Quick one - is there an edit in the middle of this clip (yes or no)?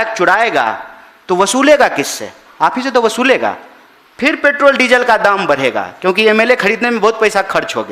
no